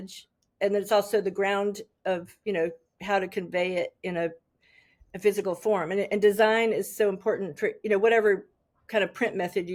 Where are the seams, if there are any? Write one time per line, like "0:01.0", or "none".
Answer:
none

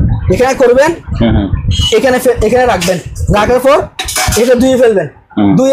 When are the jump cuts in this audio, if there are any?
none

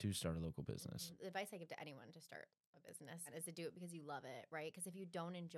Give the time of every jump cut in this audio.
0:01.1
0:03.3

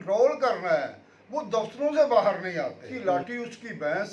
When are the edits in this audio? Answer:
0:02.8

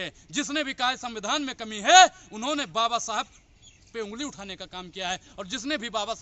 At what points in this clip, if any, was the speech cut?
none

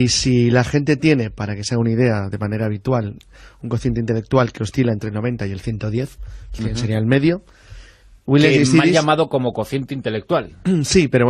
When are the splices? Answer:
0:01.5

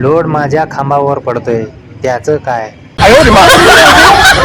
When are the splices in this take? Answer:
0:02.6

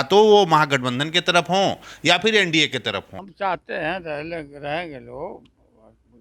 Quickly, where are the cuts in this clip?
0:03.1

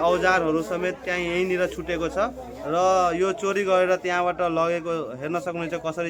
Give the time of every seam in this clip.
none

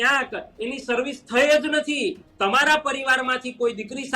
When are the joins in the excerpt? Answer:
0:02.2

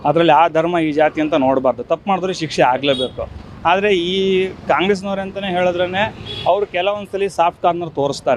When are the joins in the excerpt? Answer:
none

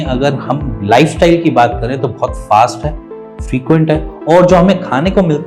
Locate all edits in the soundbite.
none

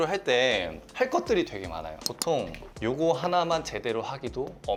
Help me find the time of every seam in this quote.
none

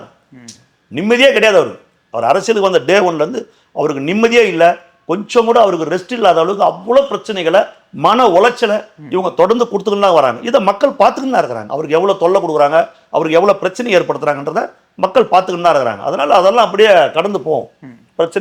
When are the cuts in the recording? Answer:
none

